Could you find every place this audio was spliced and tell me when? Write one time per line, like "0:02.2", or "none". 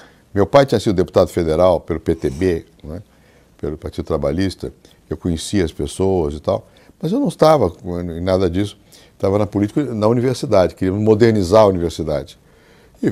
0:02.7